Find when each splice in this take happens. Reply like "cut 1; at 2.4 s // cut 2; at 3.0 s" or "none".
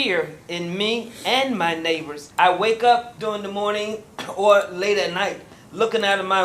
cut 1; at 2.2 s // cut 2; at 3.1 s